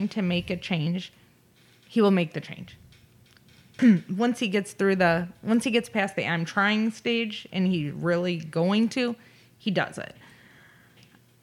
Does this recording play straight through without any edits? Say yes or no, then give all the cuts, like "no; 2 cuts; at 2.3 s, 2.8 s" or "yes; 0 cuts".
no; 1 cut; at 3.8 s